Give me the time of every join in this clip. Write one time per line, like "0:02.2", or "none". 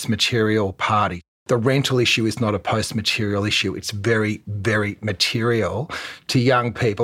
0:01.2